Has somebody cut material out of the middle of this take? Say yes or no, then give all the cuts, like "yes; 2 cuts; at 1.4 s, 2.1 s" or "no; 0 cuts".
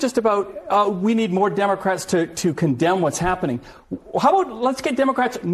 no; 0 cuts